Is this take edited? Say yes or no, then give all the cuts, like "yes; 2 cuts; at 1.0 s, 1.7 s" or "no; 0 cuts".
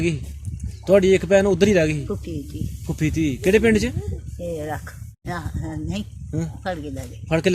yes; 1 cut; at 5.2 s